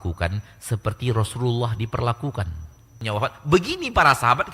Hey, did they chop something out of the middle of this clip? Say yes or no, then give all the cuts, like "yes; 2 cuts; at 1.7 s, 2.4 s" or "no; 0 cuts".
yes; 1 cut; at 3.0 s